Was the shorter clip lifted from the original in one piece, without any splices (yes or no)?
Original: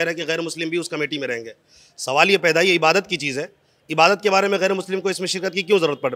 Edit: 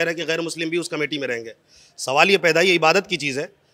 yes